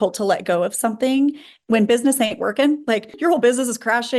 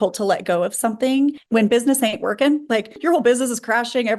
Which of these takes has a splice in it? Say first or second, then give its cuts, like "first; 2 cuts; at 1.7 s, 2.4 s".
second; 1 cut; at 1.4 s